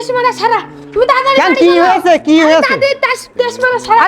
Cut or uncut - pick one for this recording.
uncut